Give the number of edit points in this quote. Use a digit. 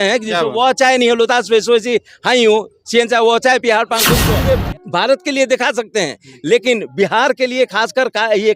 1